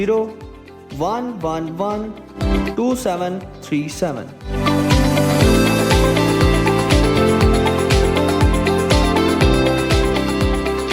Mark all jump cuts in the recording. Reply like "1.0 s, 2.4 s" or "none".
none